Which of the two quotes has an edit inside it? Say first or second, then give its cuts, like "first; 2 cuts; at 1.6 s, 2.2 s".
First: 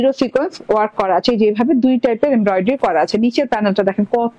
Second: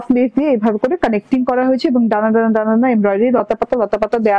first; 1 cut; at 3.1 s